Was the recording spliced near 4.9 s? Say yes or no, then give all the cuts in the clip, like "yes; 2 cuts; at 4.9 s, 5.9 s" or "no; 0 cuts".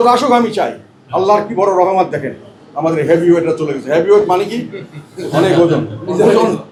no; 0 cuts